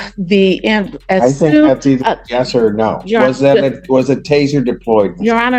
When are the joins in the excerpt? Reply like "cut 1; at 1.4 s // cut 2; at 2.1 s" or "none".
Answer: none